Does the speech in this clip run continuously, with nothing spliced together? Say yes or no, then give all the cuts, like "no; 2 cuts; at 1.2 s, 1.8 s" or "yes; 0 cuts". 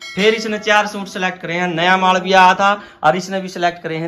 yes; 0 cuts